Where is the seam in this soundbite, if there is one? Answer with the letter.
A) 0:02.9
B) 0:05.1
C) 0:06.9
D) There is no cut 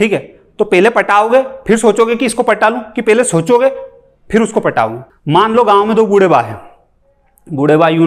B